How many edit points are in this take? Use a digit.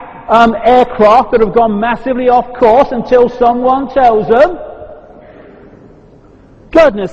1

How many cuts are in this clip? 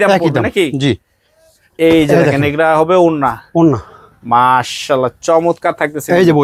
0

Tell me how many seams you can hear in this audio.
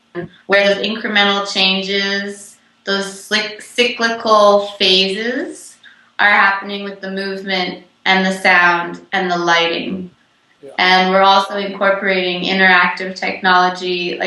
1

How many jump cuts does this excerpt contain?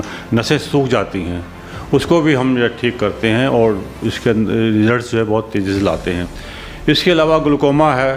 0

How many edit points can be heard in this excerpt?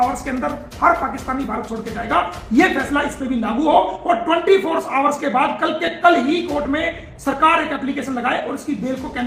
0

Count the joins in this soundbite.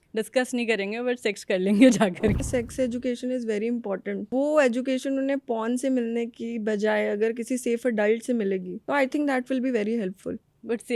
3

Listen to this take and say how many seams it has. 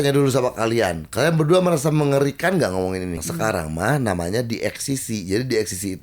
1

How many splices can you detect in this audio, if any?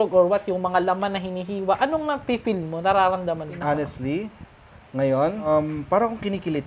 2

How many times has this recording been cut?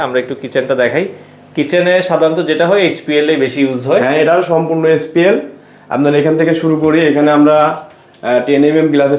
0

